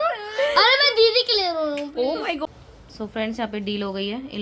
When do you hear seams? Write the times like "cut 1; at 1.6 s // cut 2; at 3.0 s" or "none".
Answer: cut 1; at 2.4 s